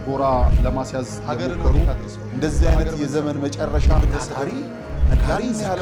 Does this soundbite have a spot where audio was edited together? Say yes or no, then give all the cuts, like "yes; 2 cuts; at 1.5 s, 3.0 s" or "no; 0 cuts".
no; 0 cuts